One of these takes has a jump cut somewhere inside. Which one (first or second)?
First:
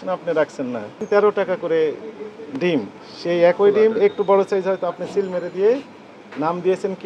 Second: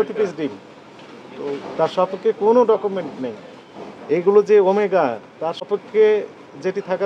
first